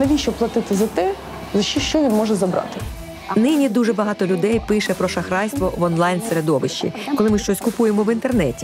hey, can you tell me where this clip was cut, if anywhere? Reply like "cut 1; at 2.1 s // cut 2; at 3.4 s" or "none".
cut 1; at 2.9 s // cut 2; at 7.0 s